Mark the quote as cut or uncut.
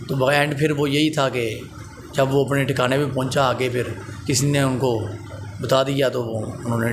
uncut